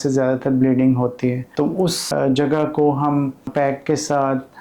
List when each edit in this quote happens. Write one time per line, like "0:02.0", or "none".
0:02.0
0:03.5